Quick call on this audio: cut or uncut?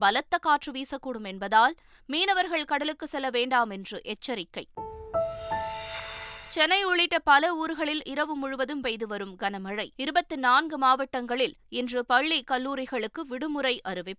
cut